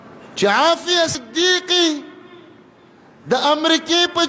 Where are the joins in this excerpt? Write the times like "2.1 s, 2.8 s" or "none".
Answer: 1.2 s